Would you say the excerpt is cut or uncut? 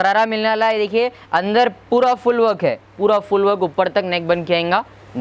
uncut